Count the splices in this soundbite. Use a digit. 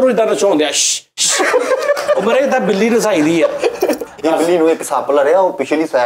1